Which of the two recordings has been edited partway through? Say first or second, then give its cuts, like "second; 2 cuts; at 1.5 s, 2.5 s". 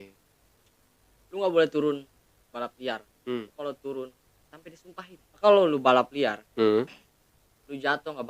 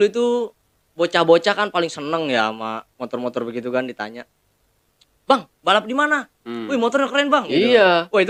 first; 1 cut; at 5.3 s